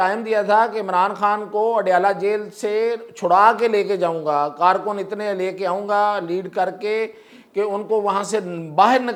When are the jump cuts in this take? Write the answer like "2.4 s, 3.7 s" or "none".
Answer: none